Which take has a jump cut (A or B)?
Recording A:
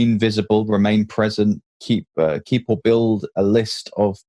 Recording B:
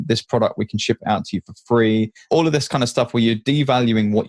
B